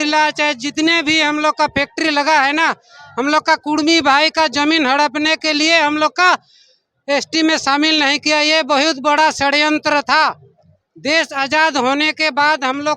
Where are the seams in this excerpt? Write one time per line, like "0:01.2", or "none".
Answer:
none

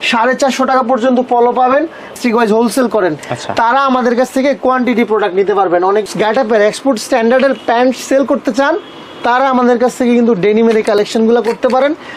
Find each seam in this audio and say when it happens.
0:02.1
0:06.0

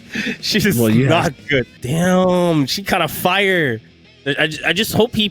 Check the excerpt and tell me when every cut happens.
0:01.8

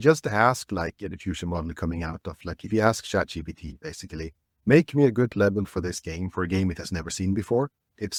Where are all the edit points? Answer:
none

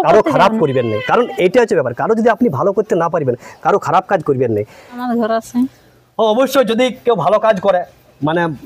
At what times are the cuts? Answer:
0:05.0

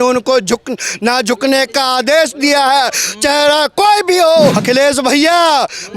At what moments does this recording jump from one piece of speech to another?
0:04.6

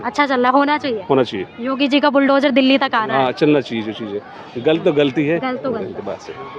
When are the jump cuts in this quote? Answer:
none

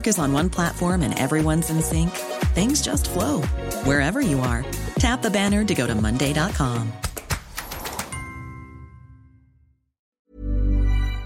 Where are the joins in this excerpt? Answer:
0:10.1

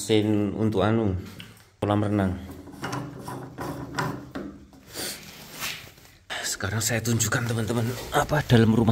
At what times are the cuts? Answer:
0:01.8
0:06.3

